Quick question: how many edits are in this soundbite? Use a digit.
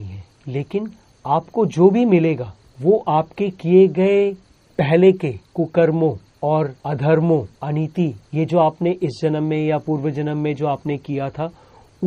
0